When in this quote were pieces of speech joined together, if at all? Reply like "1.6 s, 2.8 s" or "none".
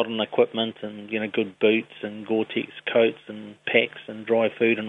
none